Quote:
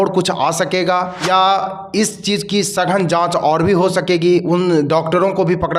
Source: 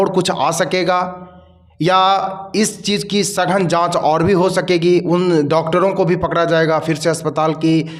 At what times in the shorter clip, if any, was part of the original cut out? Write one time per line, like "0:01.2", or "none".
0:01.2